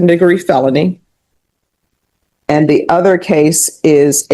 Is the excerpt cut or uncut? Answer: uncut